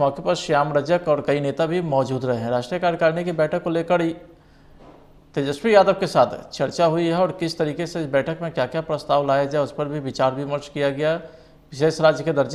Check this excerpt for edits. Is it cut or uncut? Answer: uncut